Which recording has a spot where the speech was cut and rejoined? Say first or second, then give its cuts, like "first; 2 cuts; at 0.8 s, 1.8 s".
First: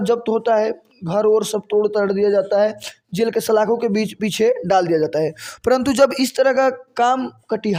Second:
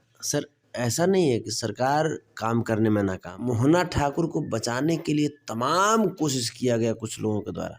second; 1 cut; at 3.3 s